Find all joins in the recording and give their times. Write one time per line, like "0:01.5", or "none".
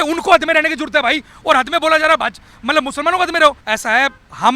0:03.6